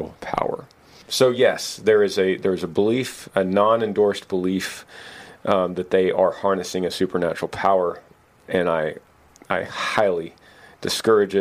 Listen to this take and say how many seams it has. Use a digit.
1